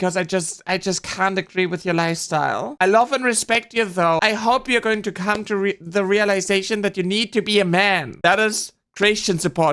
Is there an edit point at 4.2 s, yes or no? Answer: yes